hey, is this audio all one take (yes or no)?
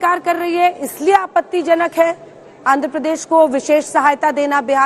yes